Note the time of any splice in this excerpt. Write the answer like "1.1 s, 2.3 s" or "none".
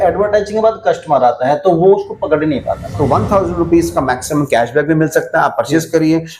2.9 s